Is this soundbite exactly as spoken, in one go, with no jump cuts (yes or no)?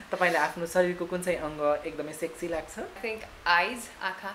no